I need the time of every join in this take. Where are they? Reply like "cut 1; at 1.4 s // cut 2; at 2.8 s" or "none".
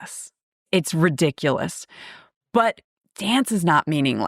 cut 1; at 2.8 s